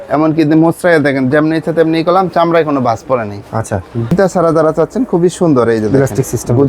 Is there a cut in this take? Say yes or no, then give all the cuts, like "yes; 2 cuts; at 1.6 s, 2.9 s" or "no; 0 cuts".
yes; 1 cut; at 4.1 s